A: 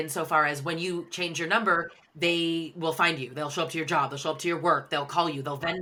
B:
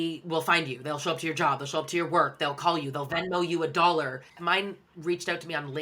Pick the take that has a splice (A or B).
B